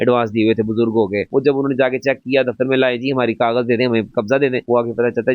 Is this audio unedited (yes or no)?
yes